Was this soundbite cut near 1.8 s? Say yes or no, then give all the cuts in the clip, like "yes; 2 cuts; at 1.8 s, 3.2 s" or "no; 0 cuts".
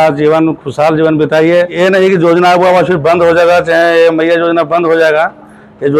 yes; 1 cut; at 1.8 s